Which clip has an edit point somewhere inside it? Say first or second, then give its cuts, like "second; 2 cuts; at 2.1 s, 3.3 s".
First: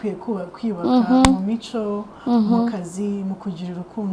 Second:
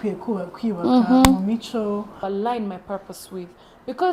second; 1 cut; at 2.2 s